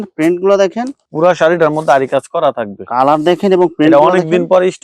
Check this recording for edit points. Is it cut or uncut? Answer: cut